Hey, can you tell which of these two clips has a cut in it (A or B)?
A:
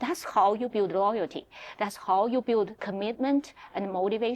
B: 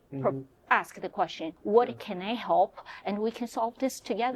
B